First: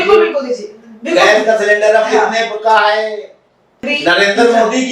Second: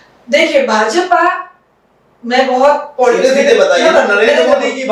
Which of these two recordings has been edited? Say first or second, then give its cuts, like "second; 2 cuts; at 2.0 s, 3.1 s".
first; 1 cut; at 3.9 s